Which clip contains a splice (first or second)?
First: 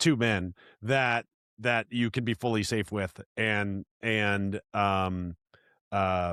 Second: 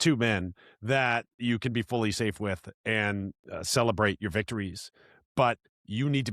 second